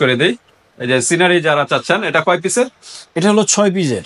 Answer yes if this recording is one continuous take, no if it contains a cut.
yes